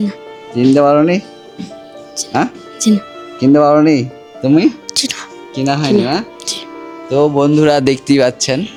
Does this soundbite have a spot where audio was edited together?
no; 0 cuts

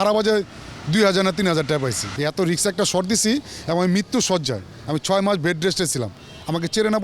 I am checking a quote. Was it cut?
yes; 1 cut; at 2.0 s

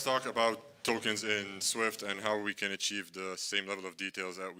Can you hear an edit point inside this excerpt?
no; 0 cuts

